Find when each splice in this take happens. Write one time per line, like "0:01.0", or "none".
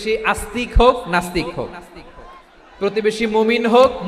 none

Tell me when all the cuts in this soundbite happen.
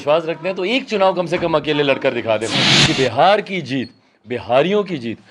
0:02.7

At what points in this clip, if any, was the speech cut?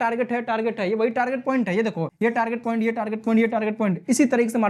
0:02.1

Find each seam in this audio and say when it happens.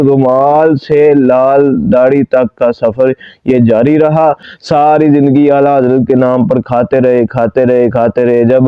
0:04.5

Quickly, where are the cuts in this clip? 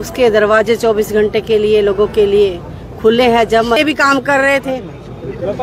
0:03.8

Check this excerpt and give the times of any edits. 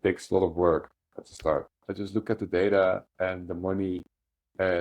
0:01.8

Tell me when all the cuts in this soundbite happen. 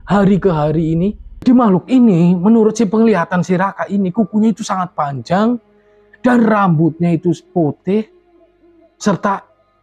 0:01.4

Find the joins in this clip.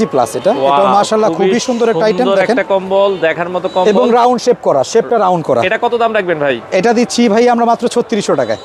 none

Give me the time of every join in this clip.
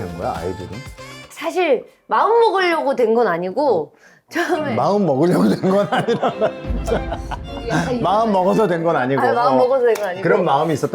0:01.2

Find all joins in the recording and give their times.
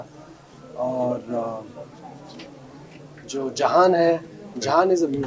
none

